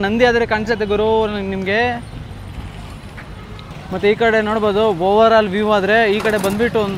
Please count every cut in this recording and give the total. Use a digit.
0